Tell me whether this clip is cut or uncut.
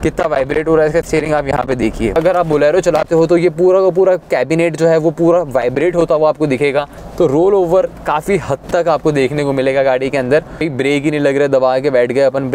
cut